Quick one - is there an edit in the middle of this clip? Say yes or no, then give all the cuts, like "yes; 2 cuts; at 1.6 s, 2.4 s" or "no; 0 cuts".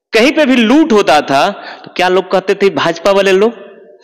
no; 0 cuts